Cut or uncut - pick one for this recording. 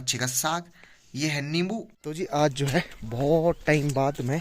cut